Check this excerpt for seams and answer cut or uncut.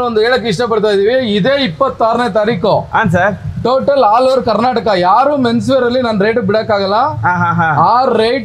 uncut